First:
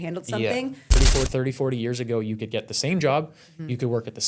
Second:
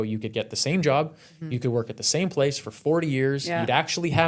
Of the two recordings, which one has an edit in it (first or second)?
first